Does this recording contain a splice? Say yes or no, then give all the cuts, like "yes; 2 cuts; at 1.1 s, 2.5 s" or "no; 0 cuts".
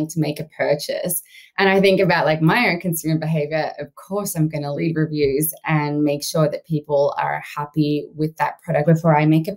yes; 2 cuts; at 4.8 s, 8.8 s